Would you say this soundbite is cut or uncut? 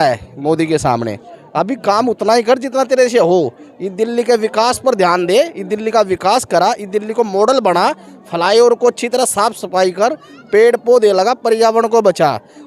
uncut